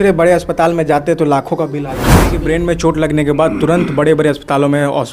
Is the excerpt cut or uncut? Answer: cut